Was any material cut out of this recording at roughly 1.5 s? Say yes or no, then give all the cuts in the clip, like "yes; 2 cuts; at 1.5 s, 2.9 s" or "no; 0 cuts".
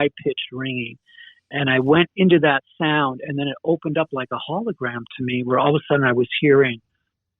yes; 1 cut; at 1.5 s